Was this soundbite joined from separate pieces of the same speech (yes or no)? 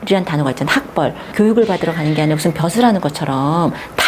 yes